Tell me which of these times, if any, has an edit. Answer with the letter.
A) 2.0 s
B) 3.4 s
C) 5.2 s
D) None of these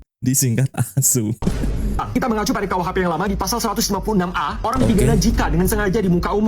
A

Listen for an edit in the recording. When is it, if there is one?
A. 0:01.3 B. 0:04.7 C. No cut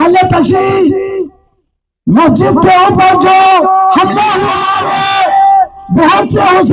B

